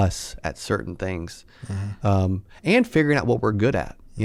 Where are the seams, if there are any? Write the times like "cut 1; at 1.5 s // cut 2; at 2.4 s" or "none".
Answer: none